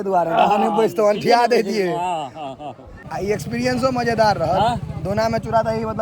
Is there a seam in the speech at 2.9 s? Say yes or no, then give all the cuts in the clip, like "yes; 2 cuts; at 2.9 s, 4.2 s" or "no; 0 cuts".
yes; 1 cut; at 2.9 s